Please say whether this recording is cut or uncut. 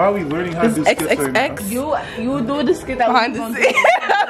uncut